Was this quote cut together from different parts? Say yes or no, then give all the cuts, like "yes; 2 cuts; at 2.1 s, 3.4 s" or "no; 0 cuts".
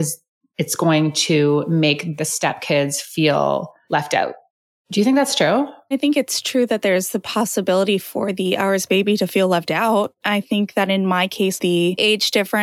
yes; 4 cuts; at 2.1 s, 6.0 s, 10.1 s, 11.6 s